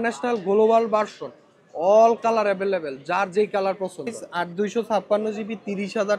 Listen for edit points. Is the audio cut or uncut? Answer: cut